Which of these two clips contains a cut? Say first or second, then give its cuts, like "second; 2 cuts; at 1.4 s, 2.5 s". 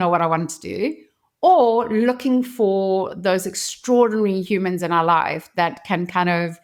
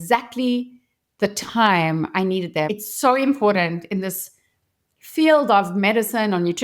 second; 1 cut; at 2.7 s